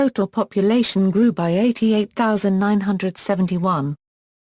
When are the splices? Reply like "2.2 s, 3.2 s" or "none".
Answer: 1.3 s